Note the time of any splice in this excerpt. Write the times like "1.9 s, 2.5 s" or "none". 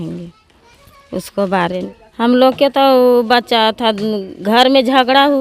1.9 s